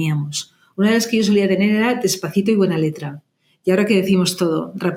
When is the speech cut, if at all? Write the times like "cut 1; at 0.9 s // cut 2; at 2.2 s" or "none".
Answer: none